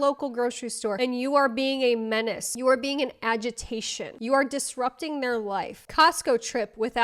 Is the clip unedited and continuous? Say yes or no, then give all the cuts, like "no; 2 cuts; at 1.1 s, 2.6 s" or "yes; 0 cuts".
no; 1 cut; at 5.7 s